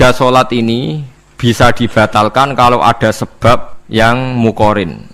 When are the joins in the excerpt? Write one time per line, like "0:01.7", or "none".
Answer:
0:03.8